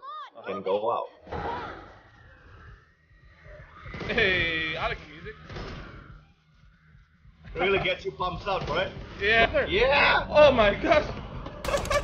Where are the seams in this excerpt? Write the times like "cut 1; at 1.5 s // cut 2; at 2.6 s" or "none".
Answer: cut 1; at 1.4 s // cut 2; at 9.5 s

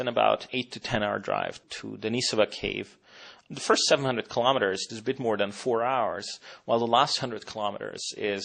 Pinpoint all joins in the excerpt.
cut 1; at 5.3 s

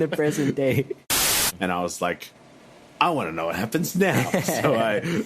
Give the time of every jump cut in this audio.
cut 1; at 1.1 s

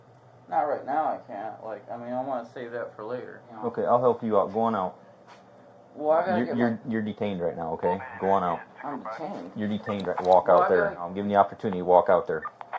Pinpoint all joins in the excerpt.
cut 1; at 3.4 s // cut 2; at 11.1 s

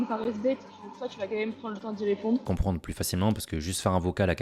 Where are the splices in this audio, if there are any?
cut 1; at 2.4 s

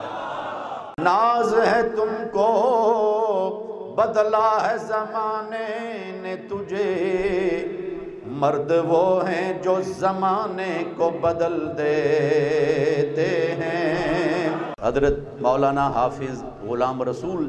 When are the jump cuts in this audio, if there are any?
cut 1; at 1.0 s // cut 2; at 14.7 s

